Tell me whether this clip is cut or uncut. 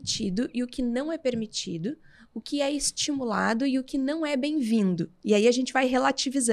uncut